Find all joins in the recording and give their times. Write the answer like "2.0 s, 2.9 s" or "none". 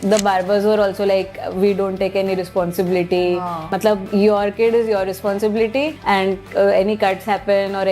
3.7 s, 6.0 s